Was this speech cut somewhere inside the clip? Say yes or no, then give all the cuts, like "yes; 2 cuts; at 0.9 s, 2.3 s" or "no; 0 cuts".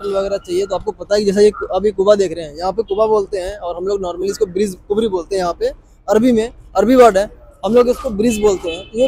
no; 0 cuts